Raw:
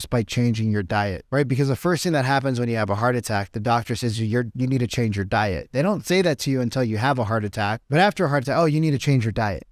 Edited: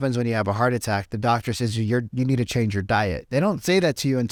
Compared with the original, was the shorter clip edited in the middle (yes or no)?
no